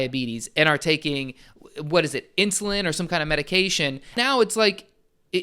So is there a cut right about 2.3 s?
no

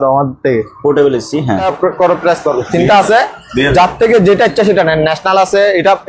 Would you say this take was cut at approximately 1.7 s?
yes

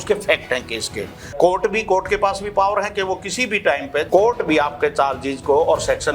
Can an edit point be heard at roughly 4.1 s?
yes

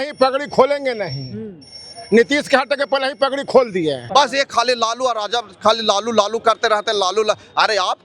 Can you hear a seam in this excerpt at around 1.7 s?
no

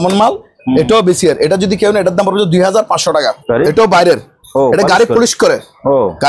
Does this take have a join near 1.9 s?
no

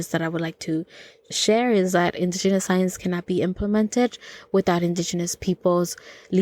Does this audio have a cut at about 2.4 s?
no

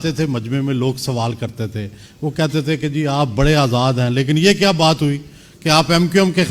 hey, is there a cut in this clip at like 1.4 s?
no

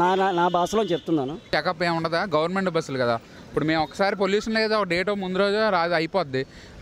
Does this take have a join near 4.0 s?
no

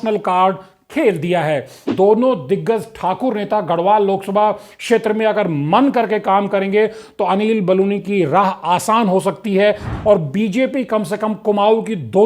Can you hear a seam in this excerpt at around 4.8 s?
no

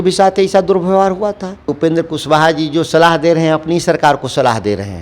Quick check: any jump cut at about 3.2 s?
no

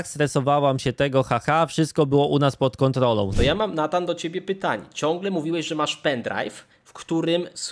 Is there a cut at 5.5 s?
no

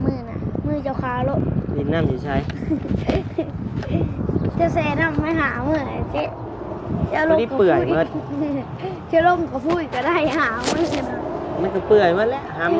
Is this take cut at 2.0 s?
no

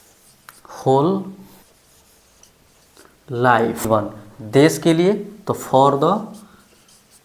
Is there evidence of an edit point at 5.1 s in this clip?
no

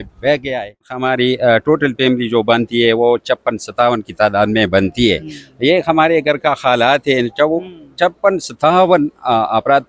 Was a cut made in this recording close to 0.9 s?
yes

